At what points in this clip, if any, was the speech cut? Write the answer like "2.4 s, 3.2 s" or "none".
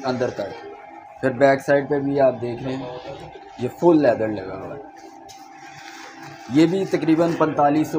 none